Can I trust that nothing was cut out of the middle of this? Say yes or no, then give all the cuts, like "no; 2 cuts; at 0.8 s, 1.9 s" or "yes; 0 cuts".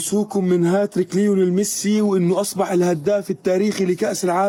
yes; 0 cuts